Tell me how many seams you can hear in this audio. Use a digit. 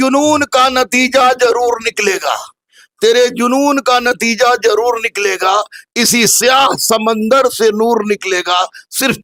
0